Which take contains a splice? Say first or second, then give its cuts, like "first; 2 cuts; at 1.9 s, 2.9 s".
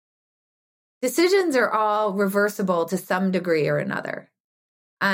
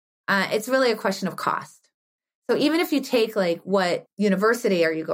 second; 1 cut; at 4.1 s